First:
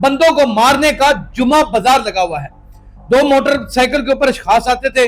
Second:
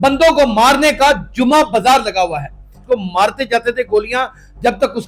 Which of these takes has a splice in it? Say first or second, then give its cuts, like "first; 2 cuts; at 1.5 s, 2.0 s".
second; 1 cut; at 2.8 s